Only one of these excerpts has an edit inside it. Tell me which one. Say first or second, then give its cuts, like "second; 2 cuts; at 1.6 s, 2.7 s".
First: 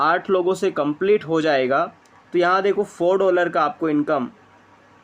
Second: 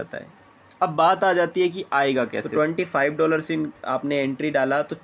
second; 1 cut; at 2.4 s